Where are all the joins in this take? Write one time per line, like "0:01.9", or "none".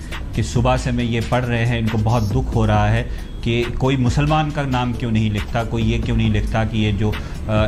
none